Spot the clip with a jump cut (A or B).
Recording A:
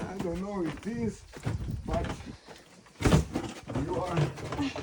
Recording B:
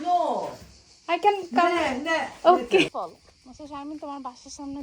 B